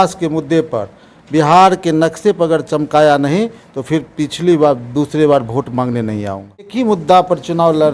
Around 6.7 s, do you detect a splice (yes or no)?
yes